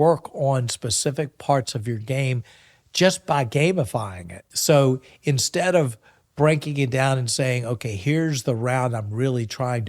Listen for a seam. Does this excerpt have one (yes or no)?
yes